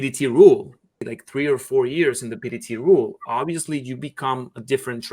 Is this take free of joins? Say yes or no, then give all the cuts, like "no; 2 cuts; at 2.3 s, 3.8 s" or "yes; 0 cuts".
no; 1 cut; at 1.1 s